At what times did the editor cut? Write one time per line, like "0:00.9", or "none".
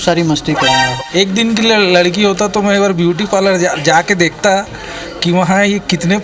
0:01.0